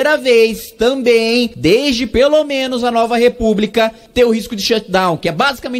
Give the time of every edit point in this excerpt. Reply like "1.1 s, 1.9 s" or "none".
1.5 s, 4.0 s